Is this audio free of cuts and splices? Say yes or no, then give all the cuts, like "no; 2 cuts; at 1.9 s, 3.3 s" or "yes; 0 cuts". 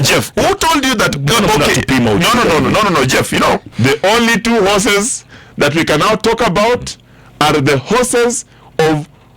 no; 1 cut; at 3.7 s